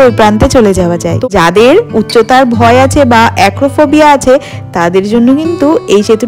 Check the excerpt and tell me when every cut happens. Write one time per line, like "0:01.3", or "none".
0:01.1